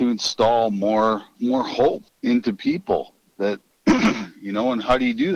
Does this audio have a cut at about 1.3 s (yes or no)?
yes